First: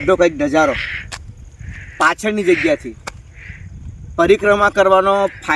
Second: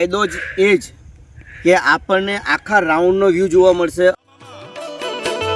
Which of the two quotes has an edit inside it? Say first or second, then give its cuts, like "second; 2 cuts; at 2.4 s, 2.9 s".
second; 1 cut; at 4.2 s